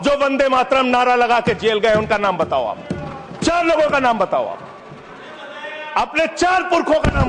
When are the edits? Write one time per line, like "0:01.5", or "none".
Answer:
none